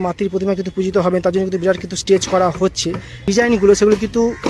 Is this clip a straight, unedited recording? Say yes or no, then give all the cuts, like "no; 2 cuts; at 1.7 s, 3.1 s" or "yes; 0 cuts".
no; 1 cut; at 3.2 s